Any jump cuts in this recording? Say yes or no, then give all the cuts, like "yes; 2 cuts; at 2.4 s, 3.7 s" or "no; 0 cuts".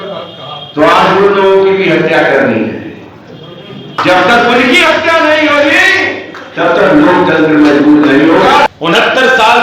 yes; 1 cut; at 8.7 s